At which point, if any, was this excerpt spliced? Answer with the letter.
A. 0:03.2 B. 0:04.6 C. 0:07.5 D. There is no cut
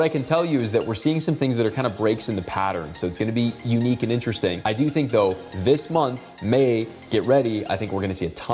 B